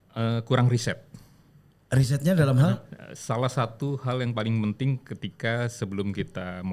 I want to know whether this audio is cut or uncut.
uncut